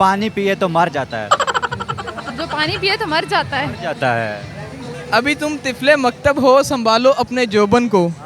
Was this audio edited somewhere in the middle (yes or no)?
yes